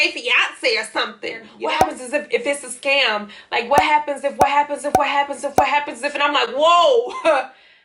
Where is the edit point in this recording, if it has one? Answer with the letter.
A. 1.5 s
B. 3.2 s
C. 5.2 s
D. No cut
A